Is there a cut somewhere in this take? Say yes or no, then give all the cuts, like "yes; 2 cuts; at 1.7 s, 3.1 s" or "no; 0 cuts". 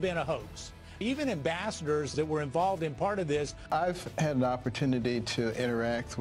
yes; 3 cuts; at 1.0 s, 2.0 s, 3.7 s